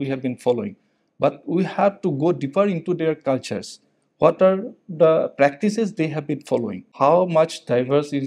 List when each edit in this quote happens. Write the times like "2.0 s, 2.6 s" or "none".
6.9 s